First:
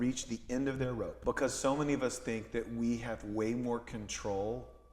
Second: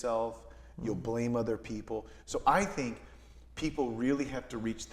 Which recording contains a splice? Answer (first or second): first